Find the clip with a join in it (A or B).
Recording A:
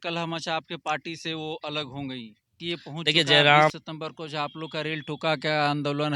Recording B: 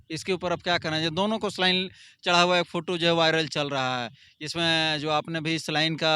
A